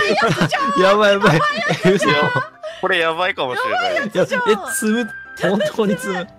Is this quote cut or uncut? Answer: uncut